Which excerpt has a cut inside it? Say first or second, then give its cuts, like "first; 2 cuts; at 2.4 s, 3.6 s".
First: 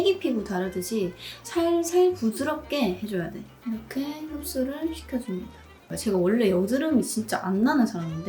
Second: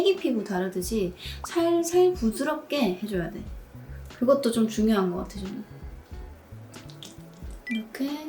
first; 2 cuts; at 3.5 s, 5.9 s